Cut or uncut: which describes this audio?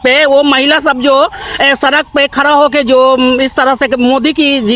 uncut